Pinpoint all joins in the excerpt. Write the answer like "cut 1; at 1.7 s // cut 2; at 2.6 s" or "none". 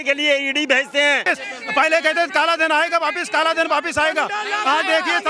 cut 1; at 1.2 s